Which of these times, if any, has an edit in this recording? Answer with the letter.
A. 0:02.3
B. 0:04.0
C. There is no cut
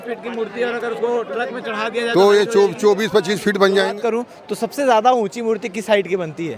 B